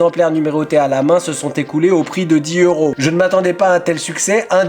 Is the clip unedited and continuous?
no; 1 cut; at 3.0 s

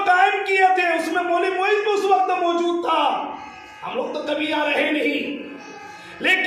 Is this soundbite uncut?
yes; 0 cuts

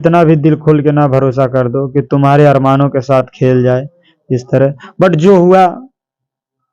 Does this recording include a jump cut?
no; 0 cuts

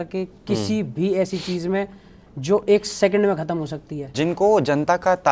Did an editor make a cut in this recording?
yes; 1 cut; at 4.2 s

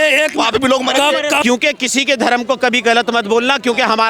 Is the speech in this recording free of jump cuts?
no; 1 cut; at 1.4 s

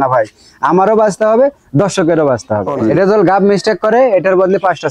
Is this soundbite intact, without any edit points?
no; 1 cut; at 2.7 s

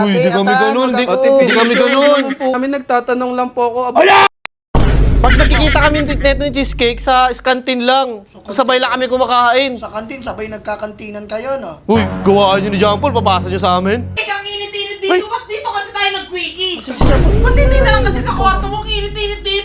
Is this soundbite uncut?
no; 2 cuts; at 2.5 s, 14.2 s

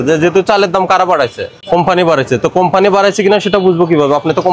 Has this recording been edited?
yes; 1 cut; at 1.6 s

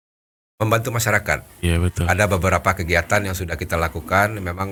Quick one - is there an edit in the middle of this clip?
no; 0 cuts

